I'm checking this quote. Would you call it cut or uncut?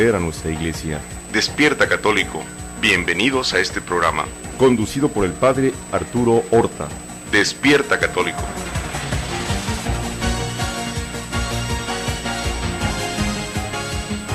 uncut